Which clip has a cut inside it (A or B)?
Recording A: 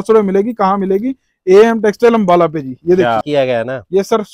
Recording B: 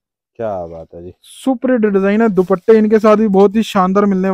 A